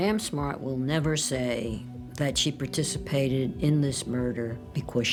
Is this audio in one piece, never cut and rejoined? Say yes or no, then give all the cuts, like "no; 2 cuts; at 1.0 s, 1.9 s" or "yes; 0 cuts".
yes; 0 cuts